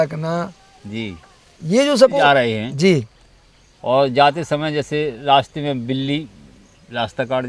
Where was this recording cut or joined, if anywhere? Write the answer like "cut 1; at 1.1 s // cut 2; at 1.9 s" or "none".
cut 1; at 2.2 s